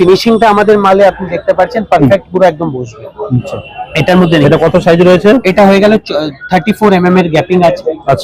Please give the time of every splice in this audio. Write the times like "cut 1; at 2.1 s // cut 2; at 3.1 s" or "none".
none